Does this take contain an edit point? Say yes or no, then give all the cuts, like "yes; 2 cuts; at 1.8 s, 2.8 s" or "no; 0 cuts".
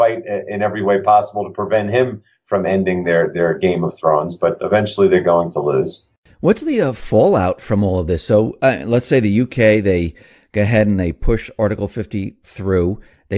yes; 1 cut; at 10.6 s